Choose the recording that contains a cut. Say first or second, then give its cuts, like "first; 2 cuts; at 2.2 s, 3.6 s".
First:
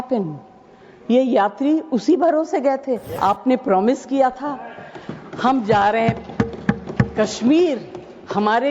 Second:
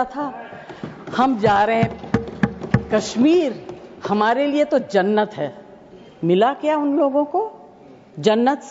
first; 1 cut; at 3.1 s